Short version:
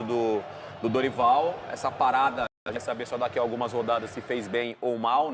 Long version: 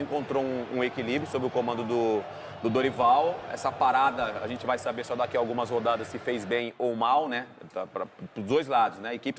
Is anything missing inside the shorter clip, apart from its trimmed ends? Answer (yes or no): yes